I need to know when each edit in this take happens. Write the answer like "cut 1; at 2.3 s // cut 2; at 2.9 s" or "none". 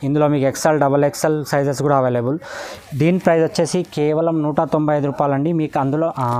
none